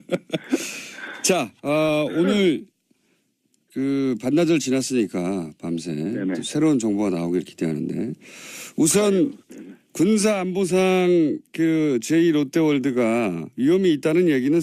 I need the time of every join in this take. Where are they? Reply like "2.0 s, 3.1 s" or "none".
12.1 s

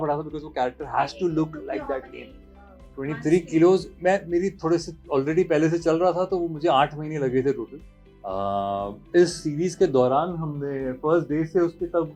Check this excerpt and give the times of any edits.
none

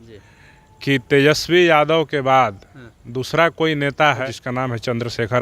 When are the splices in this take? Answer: 4.2 s

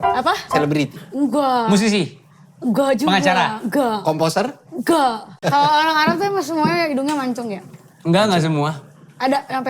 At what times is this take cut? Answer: 5.4 s

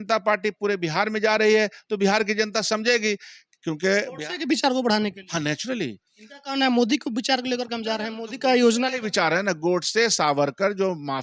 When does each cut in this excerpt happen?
none

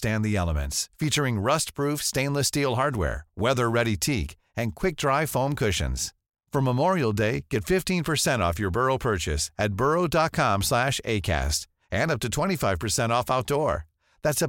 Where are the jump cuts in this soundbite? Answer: none

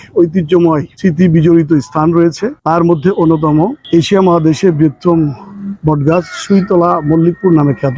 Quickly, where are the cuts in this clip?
0.9 s, 2.5 s, 3.8 s

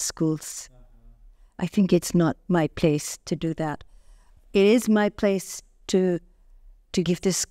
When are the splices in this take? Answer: none

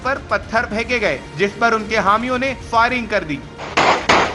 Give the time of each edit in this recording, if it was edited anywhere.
none

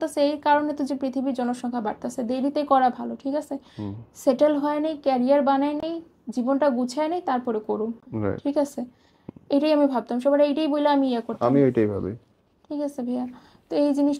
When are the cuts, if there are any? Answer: none

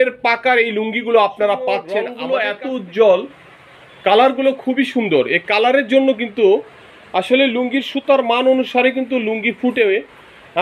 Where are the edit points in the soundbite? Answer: 2.1 s

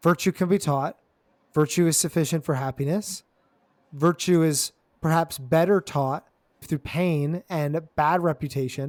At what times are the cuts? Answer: none

